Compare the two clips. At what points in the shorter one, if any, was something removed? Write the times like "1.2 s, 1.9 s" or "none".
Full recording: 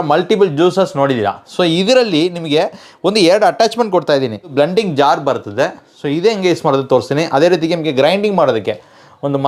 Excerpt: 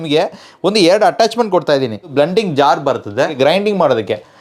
3.3 s

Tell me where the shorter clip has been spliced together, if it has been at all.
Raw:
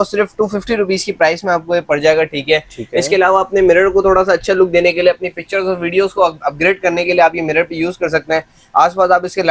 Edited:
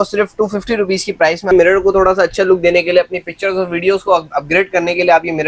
1.5 s

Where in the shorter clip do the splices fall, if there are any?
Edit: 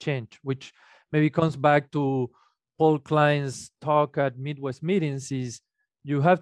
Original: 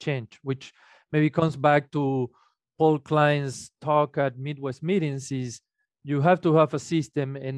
none

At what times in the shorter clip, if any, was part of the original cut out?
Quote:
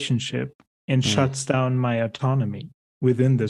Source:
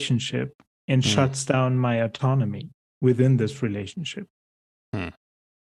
none

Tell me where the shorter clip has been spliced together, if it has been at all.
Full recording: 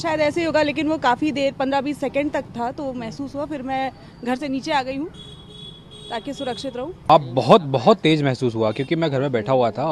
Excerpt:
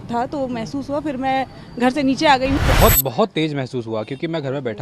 2.6 s

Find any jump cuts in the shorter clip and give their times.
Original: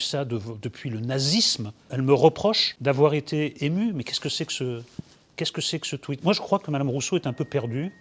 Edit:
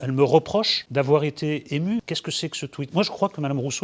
2.0 s

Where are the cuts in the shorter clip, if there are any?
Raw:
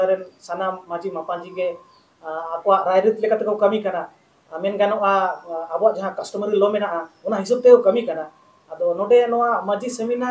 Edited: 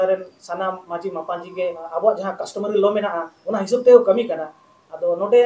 1.8 s

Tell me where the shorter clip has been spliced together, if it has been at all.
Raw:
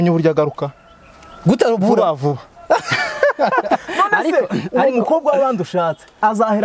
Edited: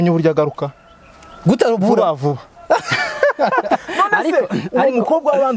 none

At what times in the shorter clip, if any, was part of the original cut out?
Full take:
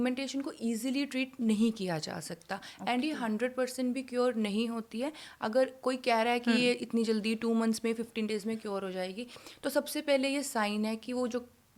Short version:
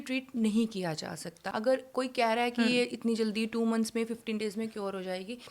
1.4 s

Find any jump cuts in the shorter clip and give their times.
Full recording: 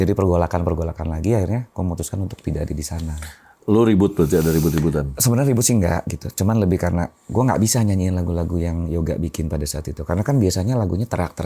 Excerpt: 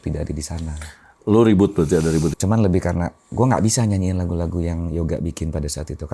2.3 s

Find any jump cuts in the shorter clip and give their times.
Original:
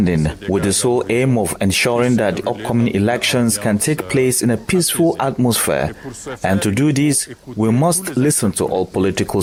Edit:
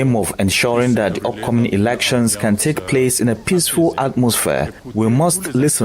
4.8 s

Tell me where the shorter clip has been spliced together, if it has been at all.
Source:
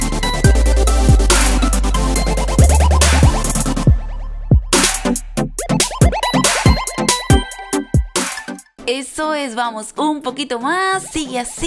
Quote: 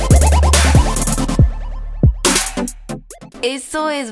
3.0 s

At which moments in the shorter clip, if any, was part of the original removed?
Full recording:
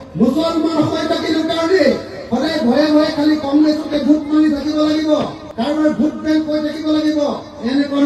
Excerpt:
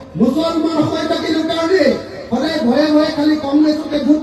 none

